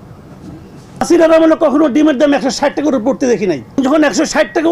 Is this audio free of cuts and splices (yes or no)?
no